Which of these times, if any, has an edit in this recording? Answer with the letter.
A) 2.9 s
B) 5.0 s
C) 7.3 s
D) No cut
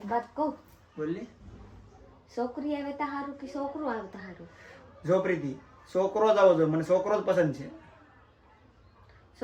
D